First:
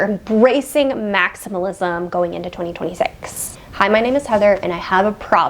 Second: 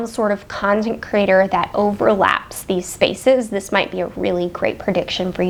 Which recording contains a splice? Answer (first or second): first